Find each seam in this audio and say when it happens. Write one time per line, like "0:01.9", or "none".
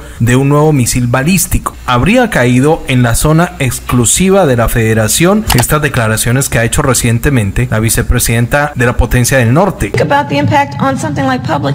0:01.8
0:05.5
0:07.6
0:08.7
0:10.0